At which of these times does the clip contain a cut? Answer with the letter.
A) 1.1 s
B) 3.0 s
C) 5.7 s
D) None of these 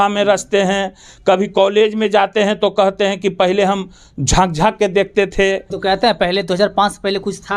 C